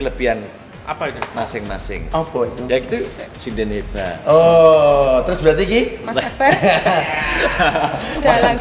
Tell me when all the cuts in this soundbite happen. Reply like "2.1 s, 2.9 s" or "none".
none